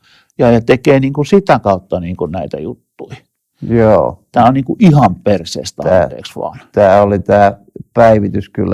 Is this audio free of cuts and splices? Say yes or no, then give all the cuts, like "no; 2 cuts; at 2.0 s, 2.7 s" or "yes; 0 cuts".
yes; 0 cuts